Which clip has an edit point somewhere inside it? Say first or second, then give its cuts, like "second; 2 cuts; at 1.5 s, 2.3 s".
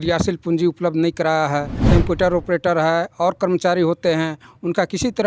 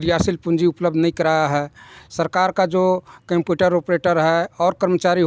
first; 1 cut; at 1.8 s